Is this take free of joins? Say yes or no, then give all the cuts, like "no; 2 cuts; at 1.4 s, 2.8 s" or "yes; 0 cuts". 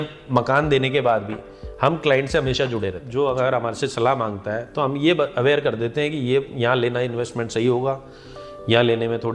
no; 1 cut; at 3.0 s